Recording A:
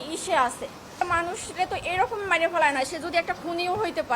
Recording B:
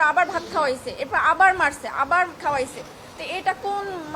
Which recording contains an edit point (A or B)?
A